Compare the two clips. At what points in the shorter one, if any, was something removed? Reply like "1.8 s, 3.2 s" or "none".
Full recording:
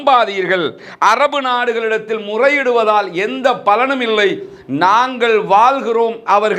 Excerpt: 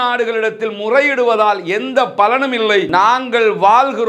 2.9 s